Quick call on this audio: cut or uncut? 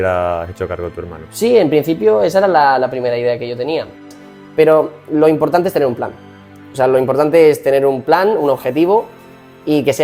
cut